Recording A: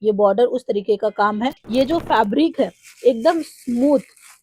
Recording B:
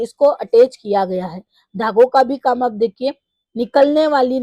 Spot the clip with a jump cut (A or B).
A